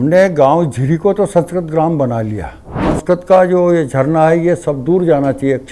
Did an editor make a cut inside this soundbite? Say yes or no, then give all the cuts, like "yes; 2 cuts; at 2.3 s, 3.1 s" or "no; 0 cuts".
yes; 1 cut; at 2.9 s